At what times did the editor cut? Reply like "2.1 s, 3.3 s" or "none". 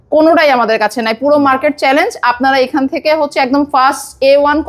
none